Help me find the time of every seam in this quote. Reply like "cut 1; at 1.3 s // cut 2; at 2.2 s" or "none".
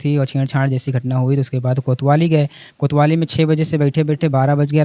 none